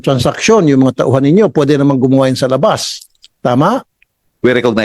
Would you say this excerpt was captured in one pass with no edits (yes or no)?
yes